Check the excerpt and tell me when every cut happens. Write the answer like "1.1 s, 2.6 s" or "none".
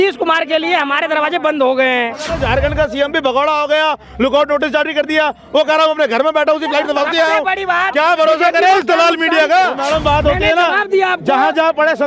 2.4 s, 9.8 s